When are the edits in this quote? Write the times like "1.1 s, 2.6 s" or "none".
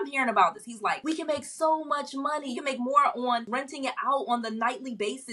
1.0 s, 2.6 s, 3.5 s